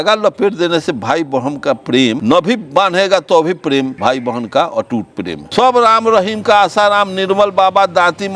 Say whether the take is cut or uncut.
cut